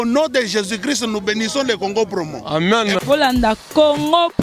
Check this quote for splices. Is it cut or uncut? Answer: uncut